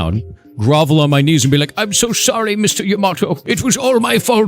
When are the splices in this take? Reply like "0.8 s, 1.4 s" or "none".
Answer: 3.4 s